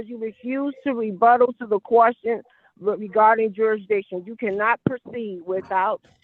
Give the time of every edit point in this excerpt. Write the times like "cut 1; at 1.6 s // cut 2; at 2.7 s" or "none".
none